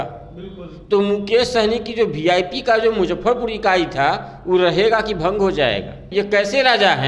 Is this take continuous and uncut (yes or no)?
no